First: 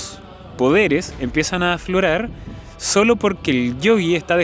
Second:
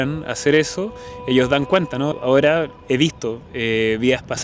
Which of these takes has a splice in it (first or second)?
second